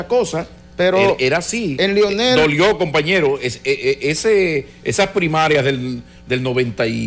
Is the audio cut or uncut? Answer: cut